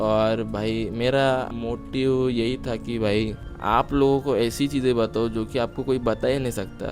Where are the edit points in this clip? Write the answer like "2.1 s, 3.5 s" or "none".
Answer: 1.5 s, 3.5 s

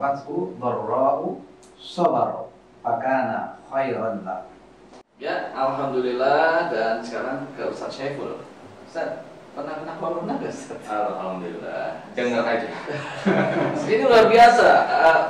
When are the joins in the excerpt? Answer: 5.2 s

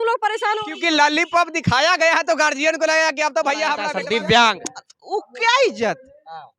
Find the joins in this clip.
3.9 s

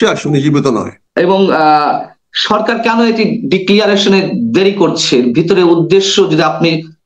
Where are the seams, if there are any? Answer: 1.0 s

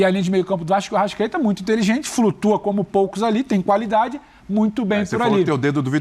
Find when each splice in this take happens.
none

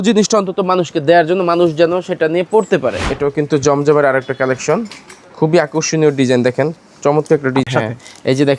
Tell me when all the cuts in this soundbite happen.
3.1 s, 7.7 s

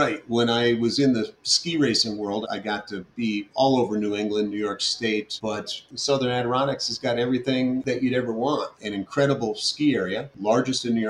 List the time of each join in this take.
2.4 s, 5.7 s, 7.8 s

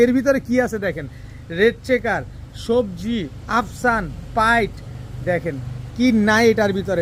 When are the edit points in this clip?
none

